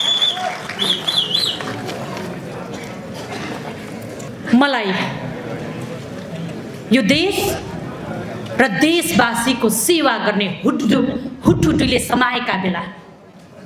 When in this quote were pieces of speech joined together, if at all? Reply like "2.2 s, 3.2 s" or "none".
4.3 s